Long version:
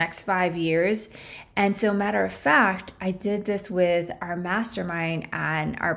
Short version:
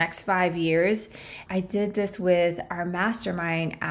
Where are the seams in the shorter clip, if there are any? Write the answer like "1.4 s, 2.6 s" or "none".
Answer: 1.4 s

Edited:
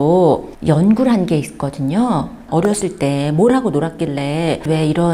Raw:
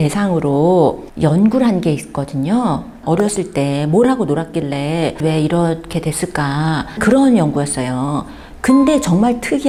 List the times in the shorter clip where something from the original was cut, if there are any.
none

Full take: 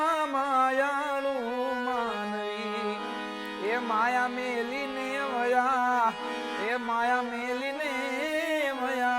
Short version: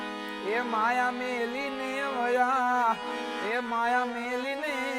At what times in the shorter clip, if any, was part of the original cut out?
none

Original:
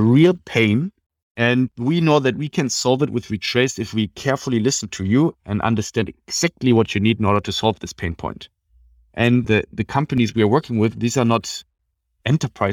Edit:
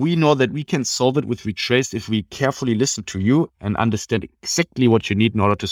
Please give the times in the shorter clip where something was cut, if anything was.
none

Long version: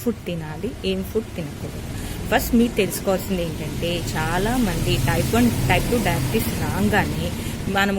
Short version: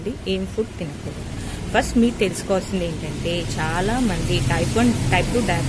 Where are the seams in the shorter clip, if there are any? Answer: none

